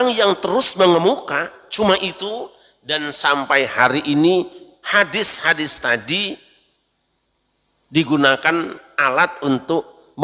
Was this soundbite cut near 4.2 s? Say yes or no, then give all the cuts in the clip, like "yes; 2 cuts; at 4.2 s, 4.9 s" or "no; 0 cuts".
no; 0 cuts